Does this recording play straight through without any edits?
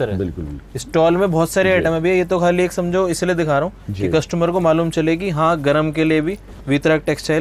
yes; 0 cuts

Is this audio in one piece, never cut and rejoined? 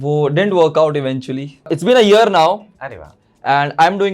no; 1 cut; at 1.7 s

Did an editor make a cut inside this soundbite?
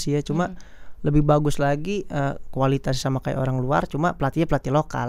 no; 0 cuts

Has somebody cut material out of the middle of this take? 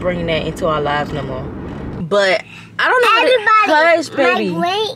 yes; 1 cut; at 1.9 s

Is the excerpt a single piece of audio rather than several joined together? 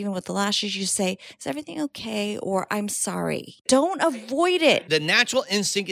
no; 2 cuts; at 3.6 s, 4.8 s

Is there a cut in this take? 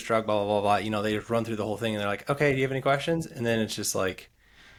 no; 0 cuts

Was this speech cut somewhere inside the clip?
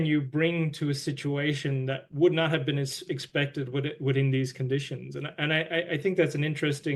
no; 0 cuts

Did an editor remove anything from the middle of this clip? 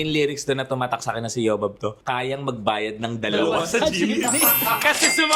no; 0 cuts

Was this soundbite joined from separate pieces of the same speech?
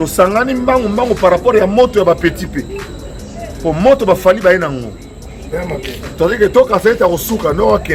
no; 0 cuts

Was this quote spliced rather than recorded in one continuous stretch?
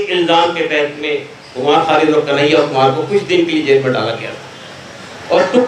no; 0 cuts

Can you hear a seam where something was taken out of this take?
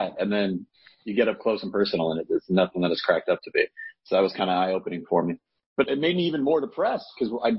yes; 1 cut; at 5.8 s

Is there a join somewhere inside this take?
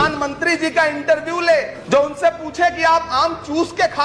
yes; 1 cut; at 1.8 s

